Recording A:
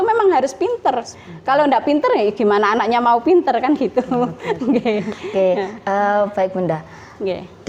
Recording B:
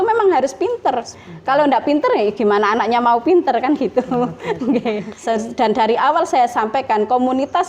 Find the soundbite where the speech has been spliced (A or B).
B